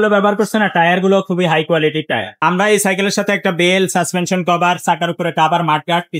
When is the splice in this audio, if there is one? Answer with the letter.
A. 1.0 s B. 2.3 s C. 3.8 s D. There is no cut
B